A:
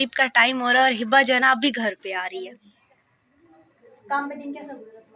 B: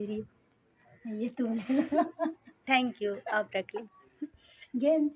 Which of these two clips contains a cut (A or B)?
A